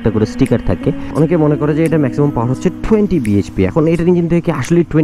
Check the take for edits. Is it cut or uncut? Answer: cut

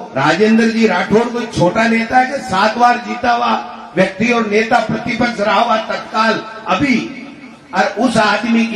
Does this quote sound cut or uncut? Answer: uncut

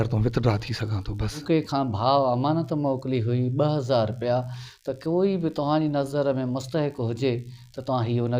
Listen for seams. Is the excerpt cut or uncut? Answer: cut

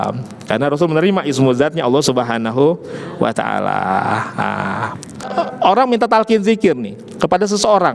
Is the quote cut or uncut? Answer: cut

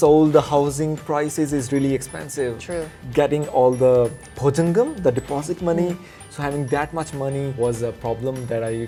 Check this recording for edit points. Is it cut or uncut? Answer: uncut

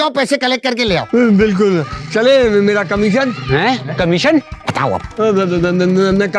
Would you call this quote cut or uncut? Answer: uncut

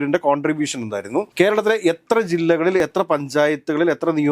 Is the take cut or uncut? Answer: uncut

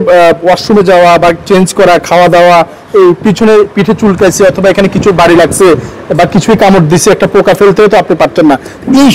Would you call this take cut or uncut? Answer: uncut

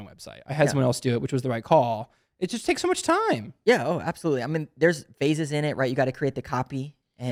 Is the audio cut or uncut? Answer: uncut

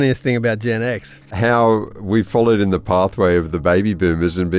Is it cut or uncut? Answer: cut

